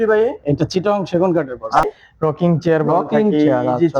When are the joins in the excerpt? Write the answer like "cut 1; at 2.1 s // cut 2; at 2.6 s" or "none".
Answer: cut 1; at 1.8 s